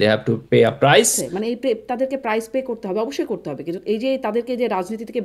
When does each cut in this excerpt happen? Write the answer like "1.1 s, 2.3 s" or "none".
1.3 s